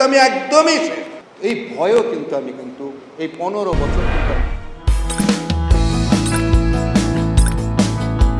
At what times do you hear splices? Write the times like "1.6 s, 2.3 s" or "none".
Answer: none